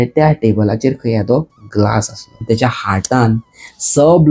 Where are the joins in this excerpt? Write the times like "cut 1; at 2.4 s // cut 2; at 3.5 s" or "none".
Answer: cut 1; at 2.4 s